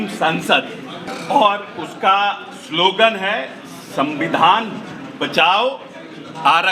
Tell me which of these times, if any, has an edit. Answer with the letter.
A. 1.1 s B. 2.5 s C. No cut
A